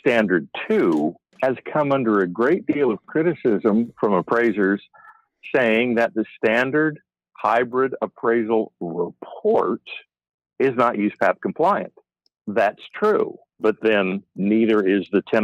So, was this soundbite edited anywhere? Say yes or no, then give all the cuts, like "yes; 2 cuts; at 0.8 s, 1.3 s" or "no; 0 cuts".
yes; 1 cut; at 1.2 s